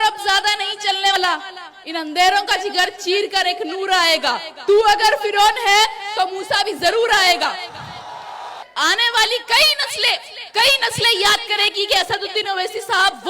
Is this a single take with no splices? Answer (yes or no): no